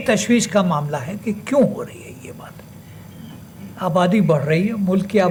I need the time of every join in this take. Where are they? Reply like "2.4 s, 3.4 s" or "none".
none